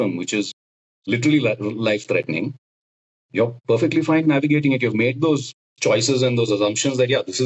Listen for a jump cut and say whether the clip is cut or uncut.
uncut